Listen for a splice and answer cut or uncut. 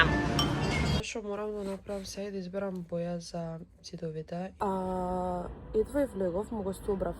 cut